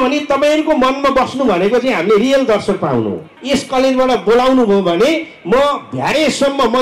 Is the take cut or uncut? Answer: cut